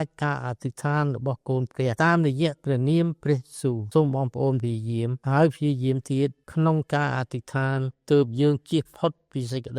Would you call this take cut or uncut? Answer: cut